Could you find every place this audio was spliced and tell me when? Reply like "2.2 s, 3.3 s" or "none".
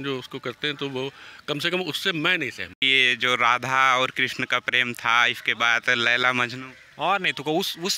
2.8 s